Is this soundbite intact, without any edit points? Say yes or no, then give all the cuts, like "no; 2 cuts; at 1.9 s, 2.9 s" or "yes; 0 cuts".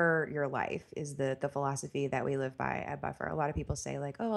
yes; 0 cuts